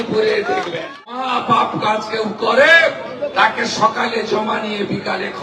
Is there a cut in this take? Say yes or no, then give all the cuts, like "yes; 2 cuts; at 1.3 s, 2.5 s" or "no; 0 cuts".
yes; 1 cut; at 1.1 s